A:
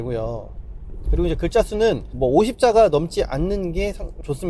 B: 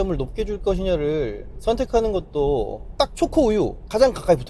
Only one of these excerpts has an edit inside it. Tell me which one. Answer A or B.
B